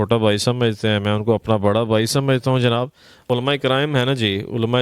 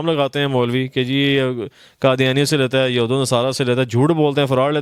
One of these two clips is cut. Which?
first; 1 cut; at 3.2 s

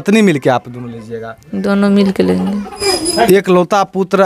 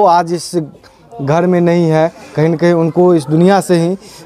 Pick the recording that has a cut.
first; 1 cut; at 2.7 s

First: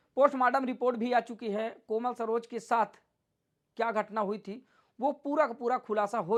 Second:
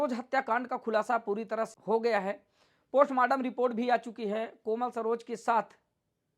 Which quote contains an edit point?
second; 1 cut; at 1.7 s

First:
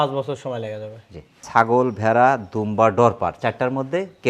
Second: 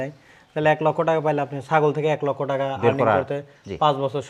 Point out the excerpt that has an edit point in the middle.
first; 1 cut; at 1.5 s

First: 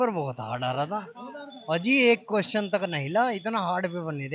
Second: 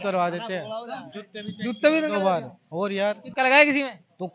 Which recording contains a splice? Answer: second; 1 cut; at 3.2 s

